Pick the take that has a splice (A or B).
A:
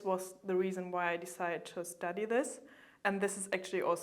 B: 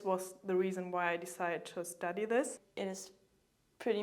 B